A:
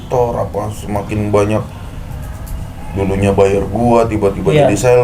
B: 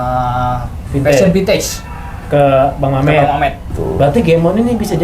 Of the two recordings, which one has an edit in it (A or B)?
B